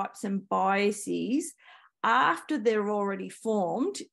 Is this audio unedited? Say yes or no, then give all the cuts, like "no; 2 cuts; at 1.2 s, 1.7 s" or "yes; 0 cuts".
yes; 0 cuts